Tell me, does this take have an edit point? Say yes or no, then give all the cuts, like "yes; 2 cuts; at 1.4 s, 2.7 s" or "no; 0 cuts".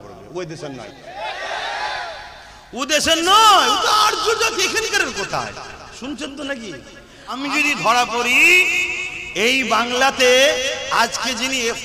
yes; 1 cut; at 7.4 s